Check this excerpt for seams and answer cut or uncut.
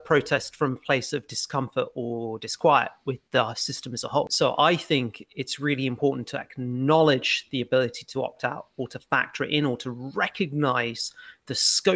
cut